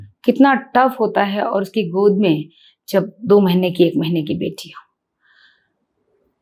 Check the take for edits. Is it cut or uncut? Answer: uncut